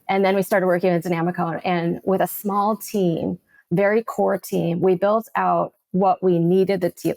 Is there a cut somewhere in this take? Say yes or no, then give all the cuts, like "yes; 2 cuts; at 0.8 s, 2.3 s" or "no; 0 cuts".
no; 0 cuts